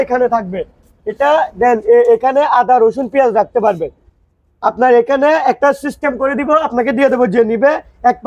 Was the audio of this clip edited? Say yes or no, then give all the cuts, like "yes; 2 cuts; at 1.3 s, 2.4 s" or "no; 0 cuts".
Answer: no; 0 cuts